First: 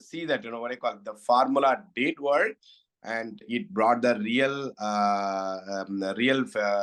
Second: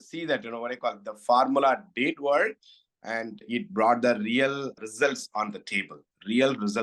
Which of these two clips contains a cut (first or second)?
second